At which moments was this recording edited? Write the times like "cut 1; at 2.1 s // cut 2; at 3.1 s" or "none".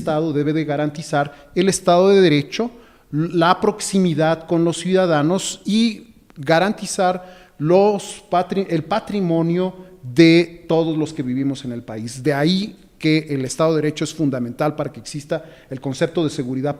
none